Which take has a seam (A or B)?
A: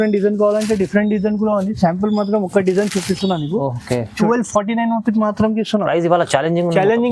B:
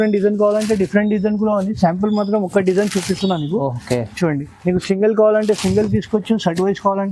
A